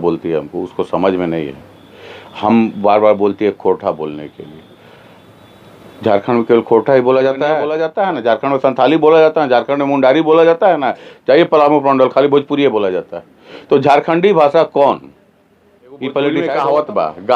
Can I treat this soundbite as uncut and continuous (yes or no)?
no